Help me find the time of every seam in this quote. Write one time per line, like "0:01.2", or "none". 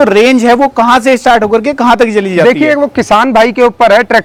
none